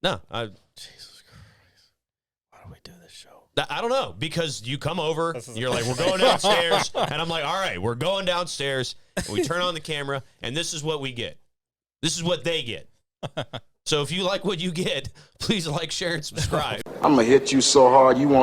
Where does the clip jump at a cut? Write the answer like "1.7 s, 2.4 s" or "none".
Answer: 16.9 s